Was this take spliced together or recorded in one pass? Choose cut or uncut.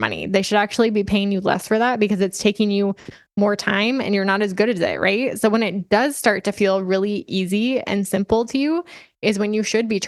uncut